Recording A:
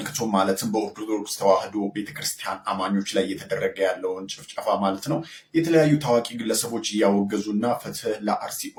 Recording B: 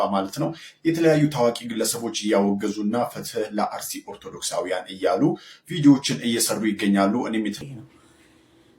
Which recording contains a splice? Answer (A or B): B